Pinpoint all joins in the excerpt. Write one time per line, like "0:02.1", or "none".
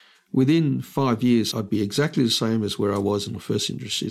0:01.5